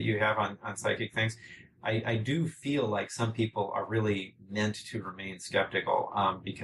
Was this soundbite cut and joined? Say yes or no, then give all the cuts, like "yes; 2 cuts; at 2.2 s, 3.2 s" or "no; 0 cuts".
no; 0 cuts